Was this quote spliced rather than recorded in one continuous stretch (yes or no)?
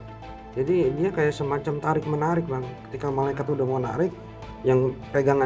no